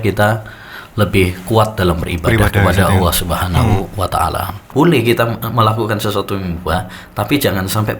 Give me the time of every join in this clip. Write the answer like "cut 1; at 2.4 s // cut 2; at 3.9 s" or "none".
cut 1; at 4.7 s